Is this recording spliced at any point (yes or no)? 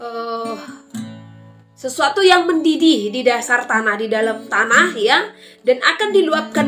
no